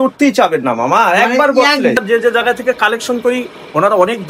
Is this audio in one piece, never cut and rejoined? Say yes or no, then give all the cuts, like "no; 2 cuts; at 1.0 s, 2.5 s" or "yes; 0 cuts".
no; 1 cut; at 2.0 s